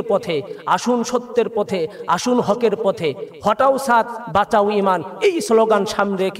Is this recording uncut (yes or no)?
yes